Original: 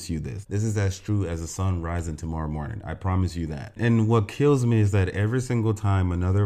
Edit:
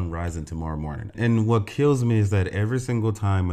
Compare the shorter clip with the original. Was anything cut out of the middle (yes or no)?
yes